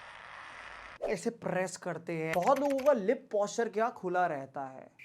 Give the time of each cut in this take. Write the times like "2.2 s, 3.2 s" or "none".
2.3 s